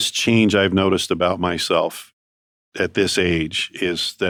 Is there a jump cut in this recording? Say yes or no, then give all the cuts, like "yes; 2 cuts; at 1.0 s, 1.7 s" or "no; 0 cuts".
no; 0 cuts